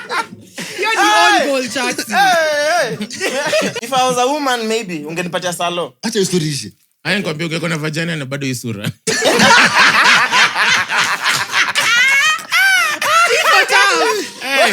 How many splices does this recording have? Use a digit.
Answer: 1